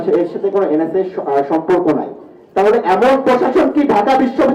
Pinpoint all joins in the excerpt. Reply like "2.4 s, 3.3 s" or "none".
none